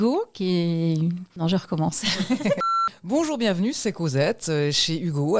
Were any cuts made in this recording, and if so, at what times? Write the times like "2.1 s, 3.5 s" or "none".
1.3 s, 2.9 s

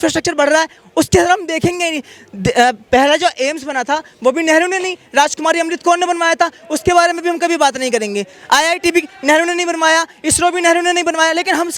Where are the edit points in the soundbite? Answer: none

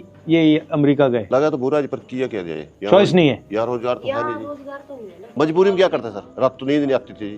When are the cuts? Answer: 5.2 s

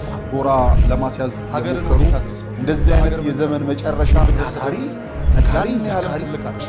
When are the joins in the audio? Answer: none

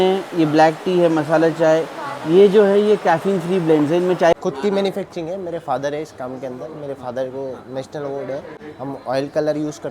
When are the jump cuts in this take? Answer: 4.4 s, 8.6 s

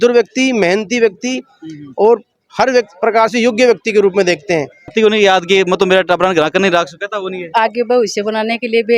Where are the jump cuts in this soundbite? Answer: 4.9 s

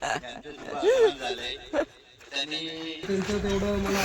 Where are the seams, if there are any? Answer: 3.1 s

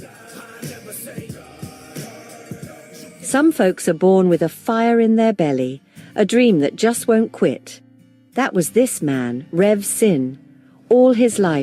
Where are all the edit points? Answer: 4.6 s, 9.0 s

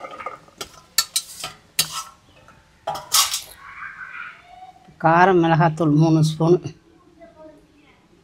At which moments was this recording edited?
none

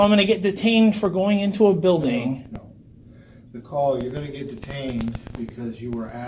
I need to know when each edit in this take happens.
none

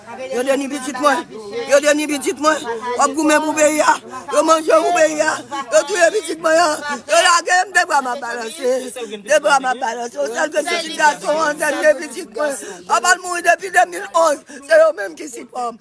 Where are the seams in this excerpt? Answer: none

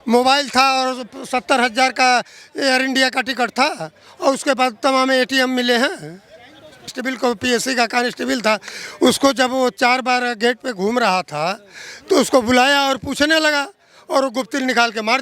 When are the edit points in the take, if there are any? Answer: 6.9 s

